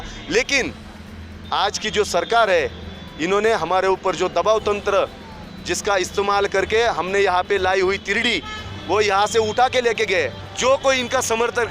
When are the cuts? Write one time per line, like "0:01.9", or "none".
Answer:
0:10.4